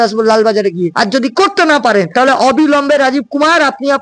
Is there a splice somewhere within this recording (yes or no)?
yes